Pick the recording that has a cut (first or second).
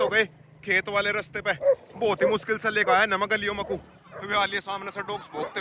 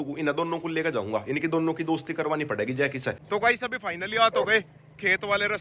second